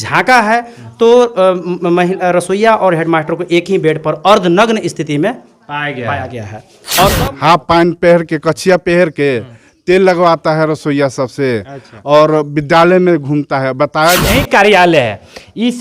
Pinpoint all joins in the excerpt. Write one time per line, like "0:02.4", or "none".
0:07.2
0:14.2